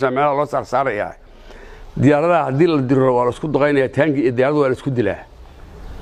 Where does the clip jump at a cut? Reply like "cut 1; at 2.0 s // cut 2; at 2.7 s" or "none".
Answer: none